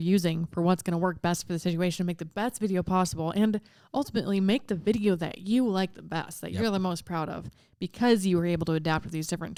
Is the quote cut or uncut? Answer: uncut